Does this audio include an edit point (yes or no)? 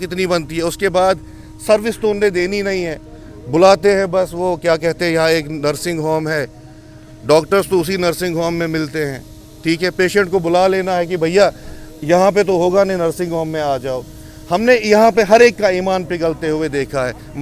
no